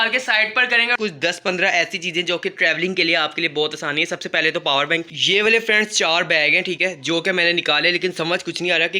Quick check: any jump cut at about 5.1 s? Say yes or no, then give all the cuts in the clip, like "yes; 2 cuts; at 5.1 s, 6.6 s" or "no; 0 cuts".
yes; 2 cuts; at 0.9 s, 5.1 s